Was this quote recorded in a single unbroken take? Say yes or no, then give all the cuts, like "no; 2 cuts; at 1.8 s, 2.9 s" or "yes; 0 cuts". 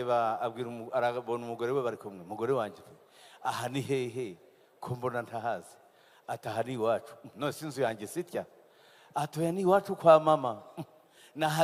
yes; 0 cuts